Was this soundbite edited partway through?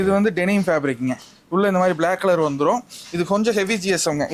no; 0 cuts

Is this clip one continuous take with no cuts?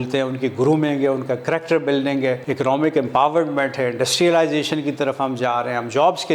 no; 1 cut; at 2.4 s

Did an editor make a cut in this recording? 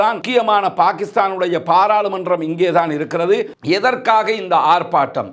yes; 1 cut; at 3.5 s

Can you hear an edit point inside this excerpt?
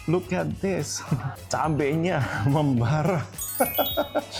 no; 0 cuts

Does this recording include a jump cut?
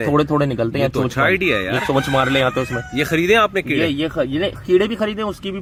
no; 0 cuts

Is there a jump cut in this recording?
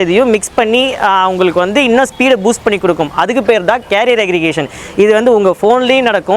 no; 0 cuts

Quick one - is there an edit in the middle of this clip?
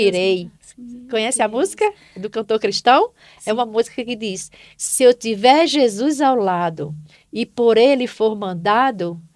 no; 0 cuts

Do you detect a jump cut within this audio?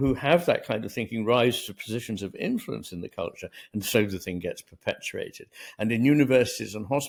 no; 0 cuts

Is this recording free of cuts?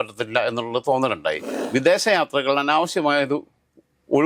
no; 1 cut; at 1.5 s

